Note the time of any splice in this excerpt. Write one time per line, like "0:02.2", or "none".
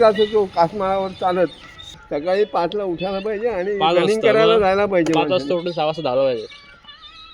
0:02.0